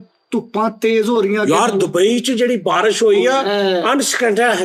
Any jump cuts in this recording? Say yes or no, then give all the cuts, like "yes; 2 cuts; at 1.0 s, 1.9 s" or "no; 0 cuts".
no; 0 cuts